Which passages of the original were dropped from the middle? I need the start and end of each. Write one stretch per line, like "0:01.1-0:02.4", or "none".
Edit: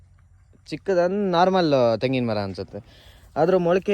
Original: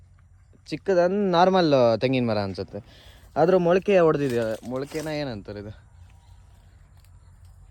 none